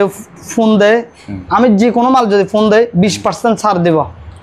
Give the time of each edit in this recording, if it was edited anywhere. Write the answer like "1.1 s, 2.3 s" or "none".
none